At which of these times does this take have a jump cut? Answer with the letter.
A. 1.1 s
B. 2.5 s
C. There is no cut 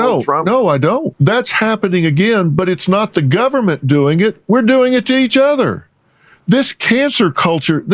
A